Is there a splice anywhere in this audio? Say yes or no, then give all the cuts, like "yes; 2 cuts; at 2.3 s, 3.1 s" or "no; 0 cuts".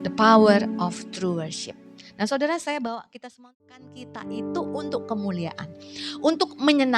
yes; 1 cut; at 3.2 s